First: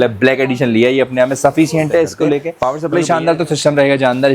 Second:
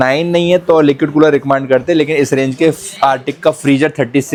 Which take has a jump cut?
first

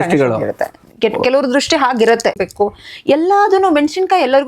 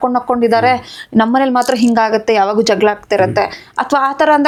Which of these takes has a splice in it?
first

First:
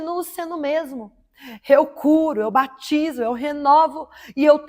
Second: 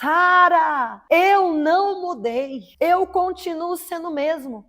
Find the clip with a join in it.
second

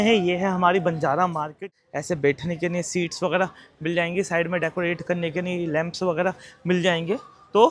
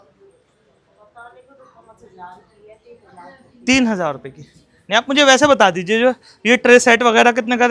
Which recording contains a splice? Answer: first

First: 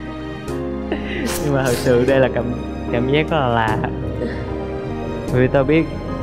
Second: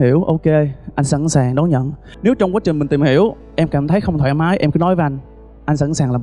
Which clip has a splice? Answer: second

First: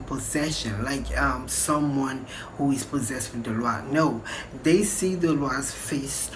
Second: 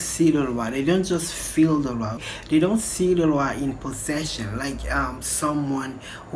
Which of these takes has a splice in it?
second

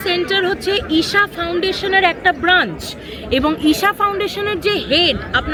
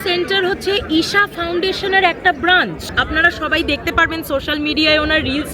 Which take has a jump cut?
second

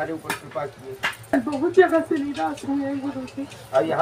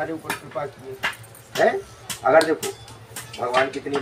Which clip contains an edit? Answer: first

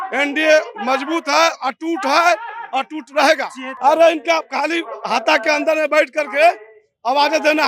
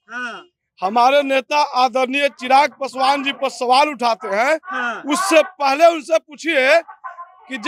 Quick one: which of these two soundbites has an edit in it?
first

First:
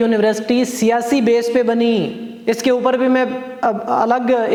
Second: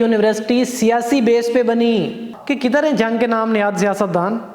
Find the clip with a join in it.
second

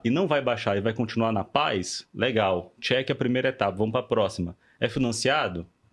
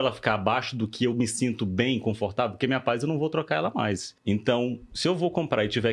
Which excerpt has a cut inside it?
second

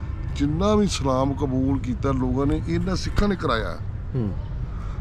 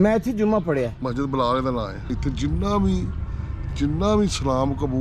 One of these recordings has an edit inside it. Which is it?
second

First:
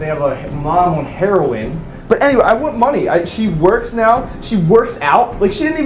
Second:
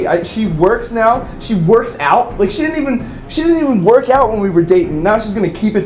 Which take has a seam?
first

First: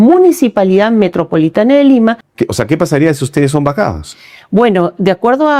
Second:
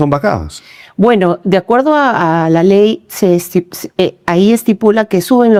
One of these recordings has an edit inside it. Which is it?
first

